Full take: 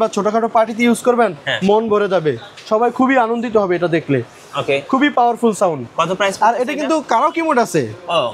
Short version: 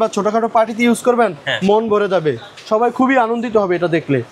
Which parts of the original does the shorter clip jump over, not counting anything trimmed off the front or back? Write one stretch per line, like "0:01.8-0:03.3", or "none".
none